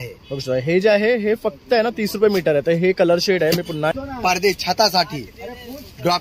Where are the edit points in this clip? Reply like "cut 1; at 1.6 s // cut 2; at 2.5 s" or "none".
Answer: cut 1; at 3.9 s